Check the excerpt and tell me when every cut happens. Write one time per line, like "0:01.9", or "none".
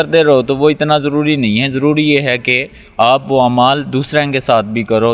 none